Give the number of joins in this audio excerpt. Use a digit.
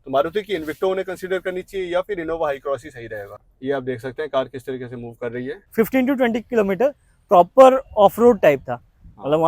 2